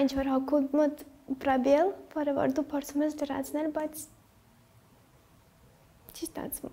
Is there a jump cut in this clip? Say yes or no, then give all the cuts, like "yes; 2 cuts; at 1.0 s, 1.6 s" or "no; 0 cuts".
no; 0 cuts